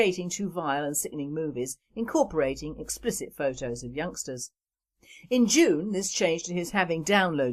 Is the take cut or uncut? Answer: uncut